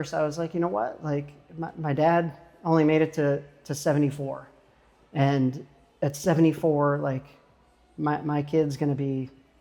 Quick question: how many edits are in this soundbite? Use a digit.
0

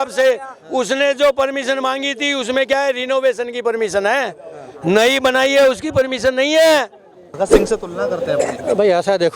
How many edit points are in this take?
1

